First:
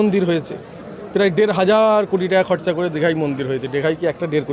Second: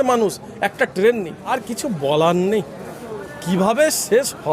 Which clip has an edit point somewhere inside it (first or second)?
second